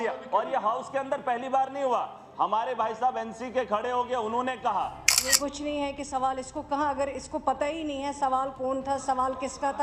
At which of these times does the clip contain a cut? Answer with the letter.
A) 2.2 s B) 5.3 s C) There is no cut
B